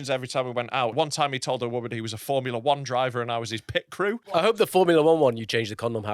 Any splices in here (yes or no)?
yes